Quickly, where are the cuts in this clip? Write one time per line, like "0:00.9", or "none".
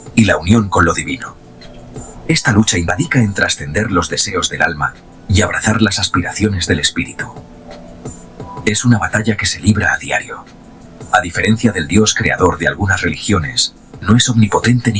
0:02.9
0:10.7